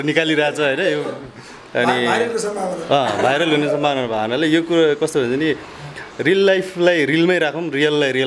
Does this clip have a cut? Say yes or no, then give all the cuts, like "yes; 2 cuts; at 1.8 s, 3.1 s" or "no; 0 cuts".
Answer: no; 0 cuts